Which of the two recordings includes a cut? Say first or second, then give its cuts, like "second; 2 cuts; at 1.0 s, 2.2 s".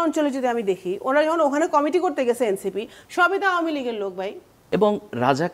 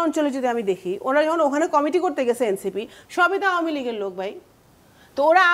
first; 1 cut; at 4.5 s